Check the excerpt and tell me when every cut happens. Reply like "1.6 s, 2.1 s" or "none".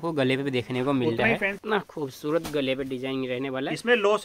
1.6 s